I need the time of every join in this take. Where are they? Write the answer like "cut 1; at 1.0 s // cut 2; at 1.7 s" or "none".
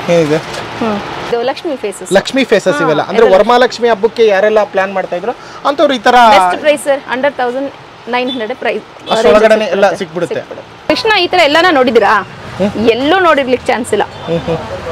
cut 1; at 1.2 s // cut 2; at 10.9 s

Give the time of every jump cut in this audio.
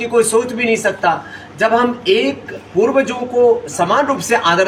none

